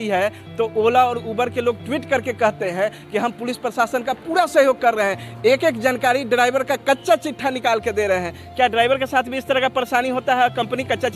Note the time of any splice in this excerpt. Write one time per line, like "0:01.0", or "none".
none